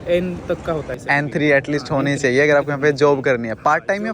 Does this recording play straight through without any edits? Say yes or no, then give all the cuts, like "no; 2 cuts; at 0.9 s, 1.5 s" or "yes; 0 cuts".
no; 1 cut; at 0.9 s